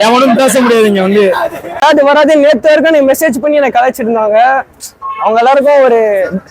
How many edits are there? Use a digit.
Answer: 1